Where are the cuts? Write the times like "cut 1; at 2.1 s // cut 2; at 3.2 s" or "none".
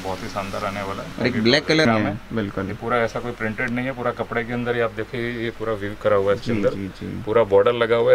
cut 1; at 1.9 s